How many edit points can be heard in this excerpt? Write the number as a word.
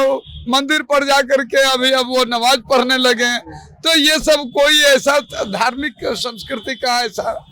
zero